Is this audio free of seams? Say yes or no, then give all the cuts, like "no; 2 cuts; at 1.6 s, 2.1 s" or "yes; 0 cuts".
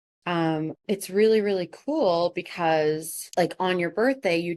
no; 1 cut; at 3.2 s